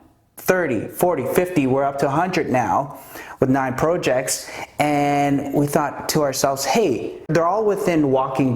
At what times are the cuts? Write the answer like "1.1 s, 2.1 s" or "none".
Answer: 7.3 s

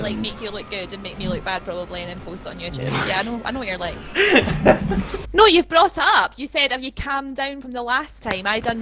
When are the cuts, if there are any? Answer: 5.2 s

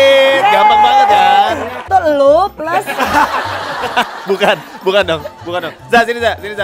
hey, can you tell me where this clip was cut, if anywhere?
1.7 s

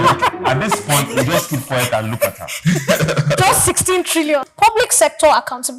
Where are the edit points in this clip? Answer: 4.4 s

